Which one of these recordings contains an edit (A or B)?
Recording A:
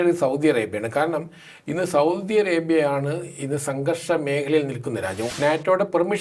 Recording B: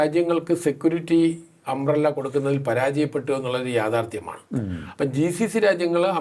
A